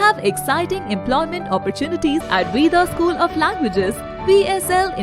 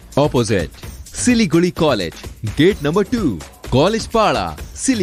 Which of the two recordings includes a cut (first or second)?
first